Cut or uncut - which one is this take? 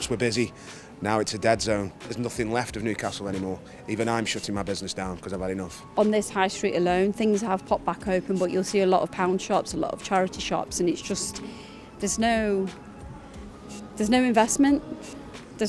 cut